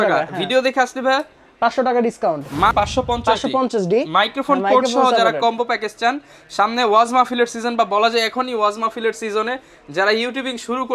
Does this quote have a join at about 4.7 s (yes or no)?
no